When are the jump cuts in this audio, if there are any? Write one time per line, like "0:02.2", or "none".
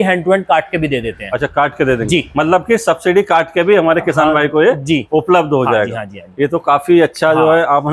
none